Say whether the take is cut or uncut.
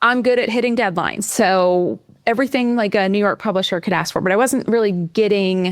cut